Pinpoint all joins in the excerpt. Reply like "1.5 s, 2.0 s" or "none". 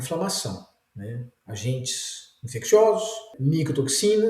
3.3 s